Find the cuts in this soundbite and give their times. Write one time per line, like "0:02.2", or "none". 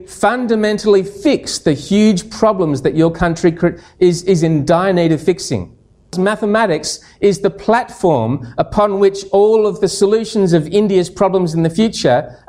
0:06.1

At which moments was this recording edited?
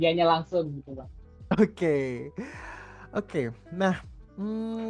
none

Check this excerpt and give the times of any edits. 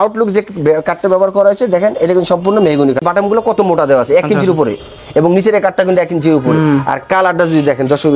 0:03.1

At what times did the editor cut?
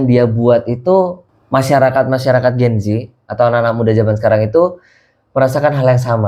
none

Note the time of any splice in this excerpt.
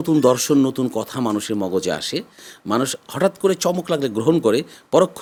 none

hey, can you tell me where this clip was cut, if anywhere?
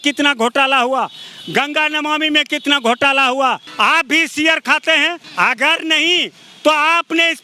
0:03.7
0:05.2

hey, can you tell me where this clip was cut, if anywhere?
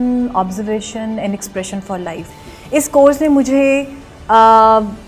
0:02.2

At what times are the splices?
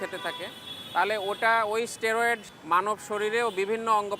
0:02.5

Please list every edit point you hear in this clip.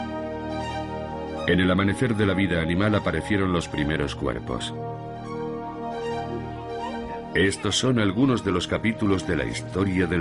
none

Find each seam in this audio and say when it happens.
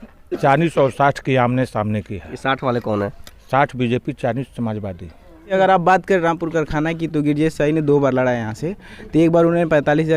0:05.5

